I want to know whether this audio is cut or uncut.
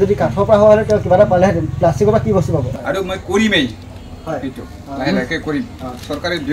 cut